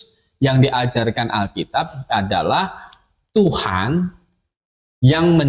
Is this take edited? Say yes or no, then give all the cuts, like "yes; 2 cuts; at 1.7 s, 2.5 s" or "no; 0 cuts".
no; 0 cuts